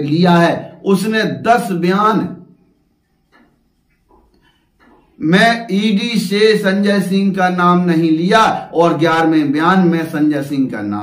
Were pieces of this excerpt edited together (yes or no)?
no